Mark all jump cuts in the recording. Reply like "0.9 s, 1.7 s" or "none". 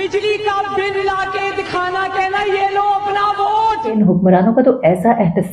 3.9 s